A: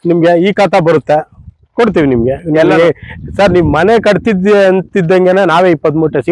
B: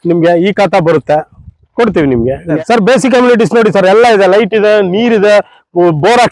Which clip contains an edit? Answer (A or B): B